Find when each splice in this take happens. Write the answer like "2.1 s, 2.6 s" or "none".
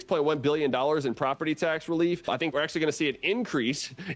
2.5 s